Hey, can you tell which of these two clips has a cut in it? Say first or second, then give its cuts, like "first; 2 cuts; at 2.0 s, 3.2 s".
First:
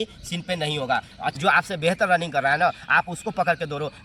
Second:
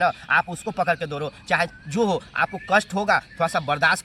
first; 1 cut; at 1.4 s